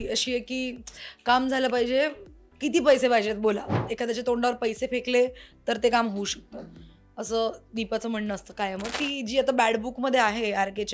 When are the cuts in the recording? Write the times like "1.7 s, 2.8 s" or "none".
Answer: 3.9 s, 9.0 s